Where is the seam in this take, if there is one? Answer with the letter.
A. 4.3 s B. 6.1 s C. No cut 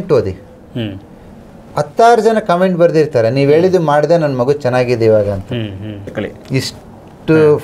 B